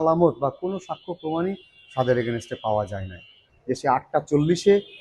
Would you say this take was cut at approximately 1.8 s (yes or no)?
no